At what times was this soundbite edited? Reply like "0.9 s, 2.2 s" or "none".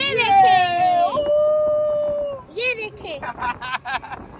none